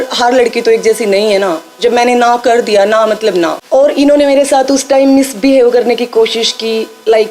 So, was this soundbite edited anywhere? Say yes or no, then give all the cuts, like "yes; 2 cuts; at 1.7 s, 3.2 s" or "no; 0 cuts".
yes; 1 cut; at 3.6 s